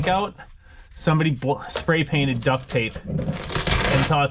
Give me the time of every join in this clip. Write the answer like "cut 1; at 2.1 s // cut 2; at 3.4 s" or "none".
none